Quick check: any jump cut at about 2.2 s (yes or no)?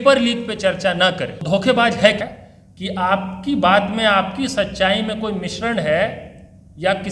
yes